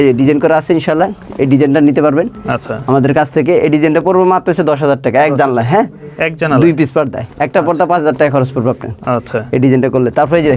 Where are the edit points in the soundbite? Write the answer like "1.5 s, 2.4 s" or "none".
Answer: none